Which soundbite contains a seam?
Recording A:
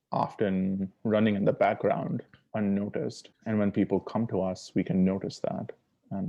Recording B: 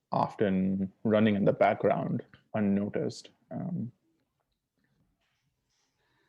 A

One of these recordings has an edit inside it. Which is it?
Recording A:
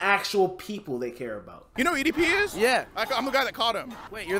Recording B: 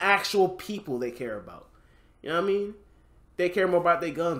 A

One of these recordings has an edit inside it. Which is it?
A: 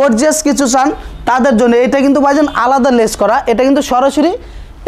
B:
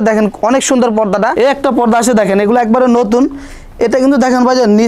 B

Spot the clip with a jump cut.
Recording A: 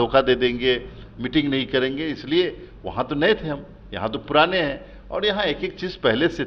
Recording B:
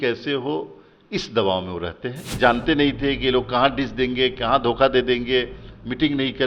B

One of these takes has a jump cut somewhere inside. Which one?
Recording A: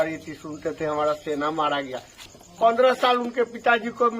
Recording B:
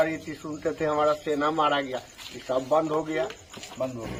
A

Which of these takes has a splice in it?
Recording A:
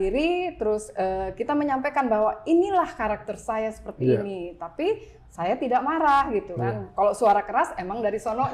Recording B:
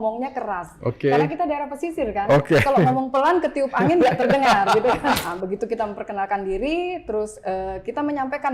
B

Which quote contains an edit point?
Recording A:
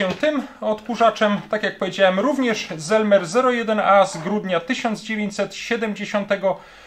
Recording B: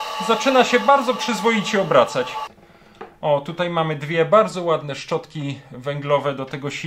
B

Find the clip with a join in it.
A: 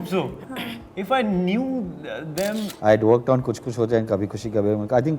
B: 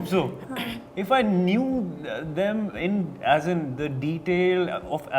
A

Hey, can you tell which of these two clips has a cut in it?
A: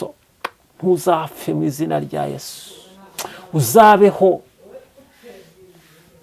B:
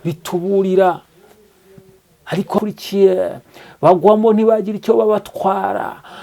B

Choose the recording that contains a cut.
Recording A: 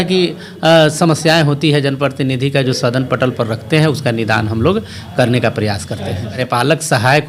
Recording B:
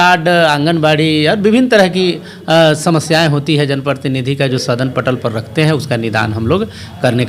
A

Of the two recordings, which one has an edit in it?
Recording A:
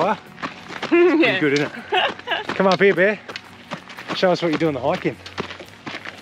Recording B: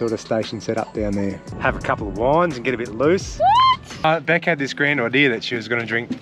B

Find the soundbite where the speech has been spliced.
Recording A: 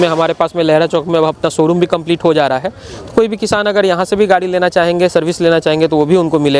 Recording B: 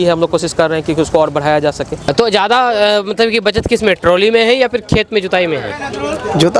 B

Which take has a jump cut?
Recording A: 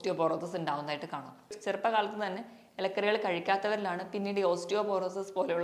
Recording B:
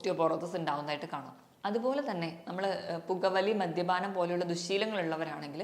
A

